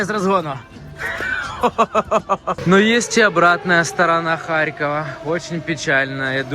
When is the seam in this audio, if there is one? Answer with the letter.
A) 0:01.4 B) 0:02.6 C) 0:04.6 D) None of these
B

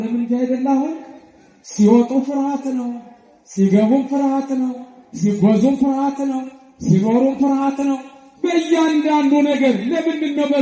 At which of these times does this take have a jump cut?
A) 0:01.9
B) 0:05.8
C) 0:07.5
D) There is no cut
D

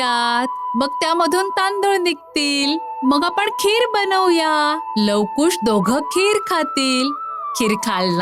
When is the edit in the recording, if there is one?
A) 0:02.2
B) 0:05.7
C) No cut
C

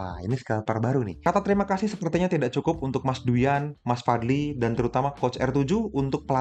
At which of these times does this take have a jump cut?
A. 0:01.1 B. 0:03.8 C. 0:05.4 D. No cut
A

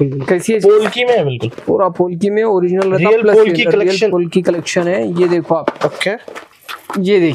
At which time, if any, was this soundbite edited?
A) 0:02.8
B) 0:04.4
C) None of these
C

